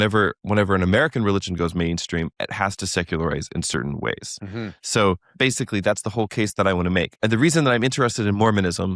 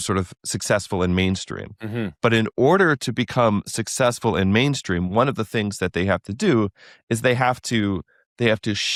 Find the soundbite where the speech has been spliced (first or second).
first